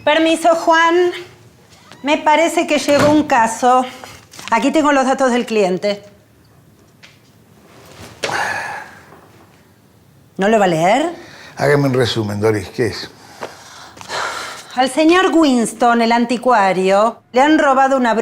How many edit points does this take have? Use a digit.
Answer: 1